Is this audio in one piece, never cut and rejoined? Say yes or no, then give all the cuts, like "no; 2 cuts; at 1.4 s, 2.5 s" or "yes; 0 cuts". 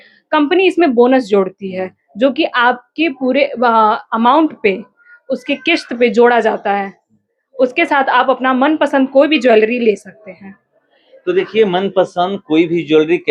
yes; 0 cuts